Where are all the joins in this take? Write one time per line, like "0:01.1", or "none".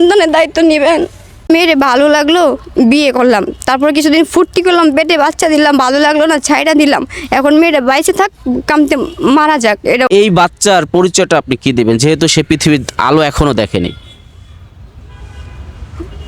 0:01.5
0:10.1

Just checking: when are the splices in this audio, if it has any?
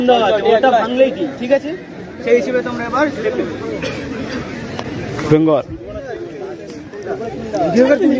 none

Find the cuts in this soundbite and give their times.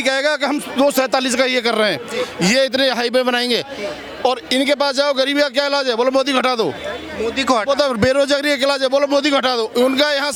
none

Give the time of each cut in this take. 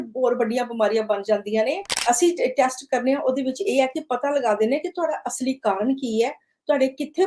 0:01.9

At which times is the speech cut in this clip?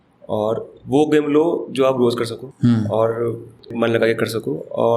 0:02.4
0:03.7

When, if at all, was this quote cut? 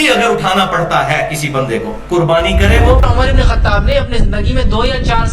0:03.0

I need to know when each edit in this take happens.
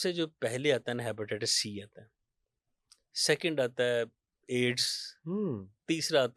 none

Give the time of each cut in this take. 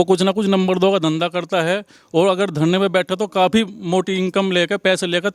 none

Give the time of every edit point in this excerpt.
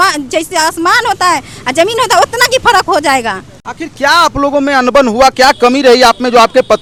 none

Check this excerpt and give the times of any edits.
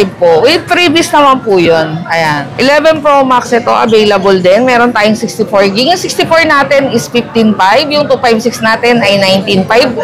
0:02.4

